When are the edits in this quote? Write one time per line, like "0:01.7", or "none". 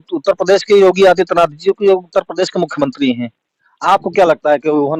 none